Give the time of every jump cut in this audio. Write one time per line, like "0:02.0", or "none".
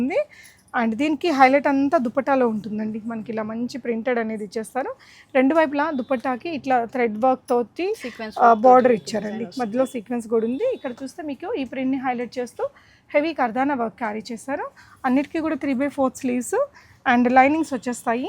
none